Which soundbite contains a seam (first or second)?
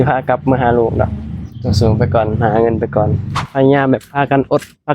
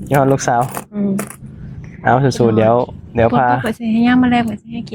first